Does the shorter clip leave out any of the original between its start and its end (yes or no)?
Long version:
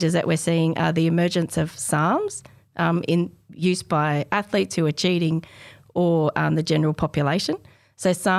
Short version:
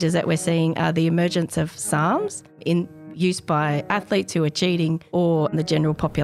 yes